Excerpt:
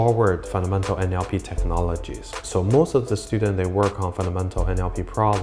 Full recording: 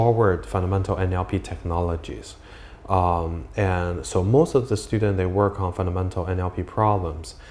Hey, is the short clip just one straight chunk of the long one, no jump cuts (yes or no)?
no